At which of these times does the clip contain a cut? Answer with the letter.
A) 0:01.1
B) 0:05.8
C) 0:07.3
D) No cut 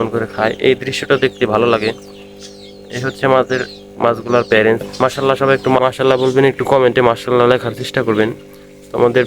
B